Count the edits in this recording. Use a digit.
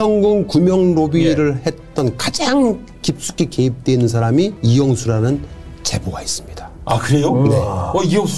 1